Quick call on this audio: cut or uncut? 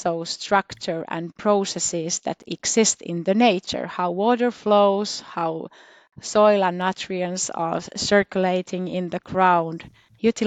uncut